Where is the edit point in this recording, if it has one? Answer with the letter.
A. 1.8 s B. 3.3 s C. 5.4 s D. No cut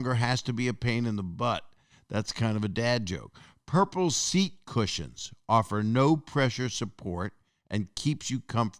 D